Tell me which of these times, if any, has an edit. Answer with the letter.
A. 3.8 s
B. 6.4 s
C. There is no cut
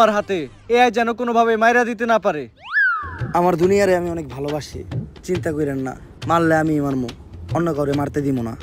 C